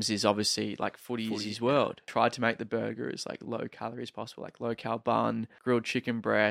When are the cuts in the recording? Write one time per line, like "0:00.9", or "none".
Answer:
0:02.1
0:05.5